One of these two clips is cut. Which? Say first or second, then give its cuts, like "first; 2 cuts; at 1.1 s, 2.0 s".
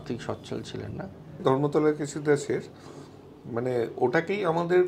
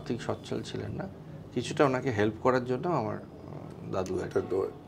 first; 1 cut; at 1.4 s